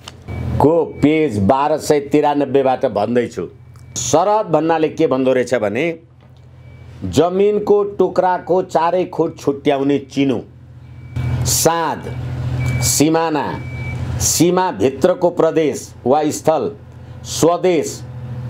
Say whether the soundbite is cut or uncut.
cut